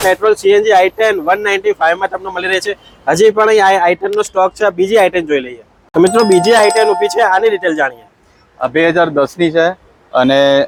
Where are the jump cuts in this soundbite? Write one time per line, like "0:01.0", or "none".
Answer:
none

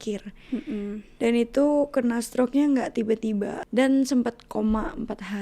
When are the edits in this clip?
0:03.6

